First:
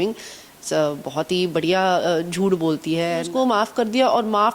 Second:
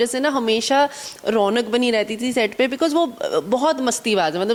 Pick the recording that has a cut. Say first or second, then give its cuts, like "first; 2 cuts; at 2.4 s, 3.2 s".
first; 1 cut; at 3.3 s